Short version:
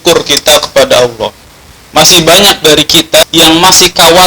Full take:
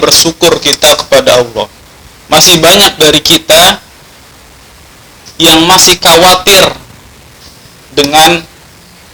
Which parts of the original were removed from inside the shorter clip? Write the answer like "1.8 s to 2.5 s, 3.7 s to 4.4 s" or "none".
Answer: 3.6 s to 5.3 s